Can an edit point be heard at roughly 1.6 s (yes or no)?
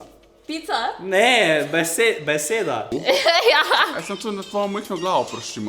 no